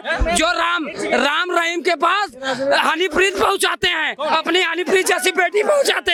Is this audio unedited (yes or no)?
yes